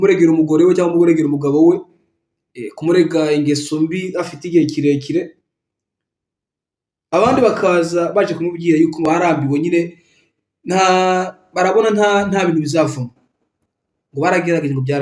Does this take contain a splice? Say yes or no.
yes